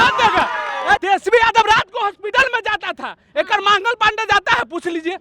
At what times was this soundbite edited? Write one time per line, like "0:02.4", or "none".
0:01.0